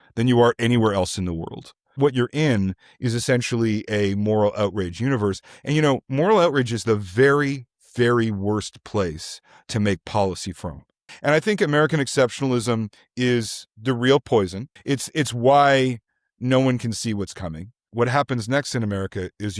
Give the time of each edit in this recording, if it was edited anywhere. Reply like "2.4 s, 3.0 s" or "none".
2.0 s, 11.1 s, 14.7 s, 17.8 s